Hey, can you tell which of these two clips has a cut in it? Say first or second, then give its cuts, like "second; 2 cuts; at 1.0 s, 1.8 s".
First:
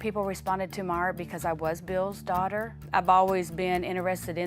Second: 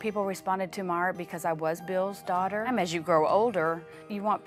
first; 1 cut; at 2.6 s